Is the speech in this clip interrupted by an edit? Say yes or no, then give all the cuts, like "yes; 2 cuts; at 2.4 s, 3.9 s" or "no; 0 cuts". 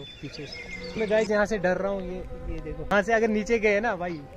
yes; 2 cuts; at 1.0 s, 2.9 s